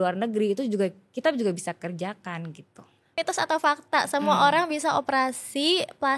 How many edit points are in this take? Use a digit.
1